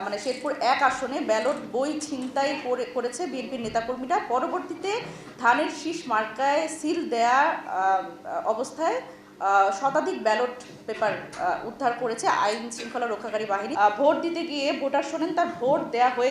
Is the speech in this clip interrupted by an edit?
yes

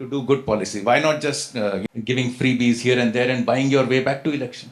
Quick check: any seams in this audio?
yes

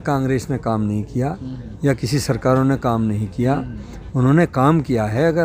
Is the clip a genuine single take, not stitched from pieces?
yes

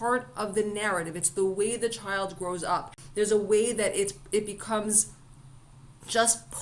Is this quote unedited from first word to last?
no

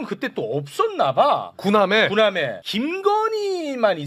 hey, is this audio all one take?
yes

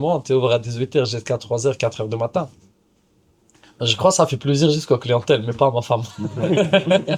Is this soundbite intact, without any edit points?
yes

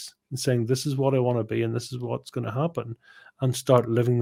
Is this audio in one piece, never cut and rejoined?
yes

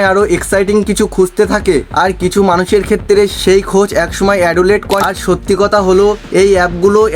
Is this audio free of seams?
no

